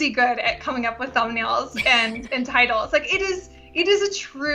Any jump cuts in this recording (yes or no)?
no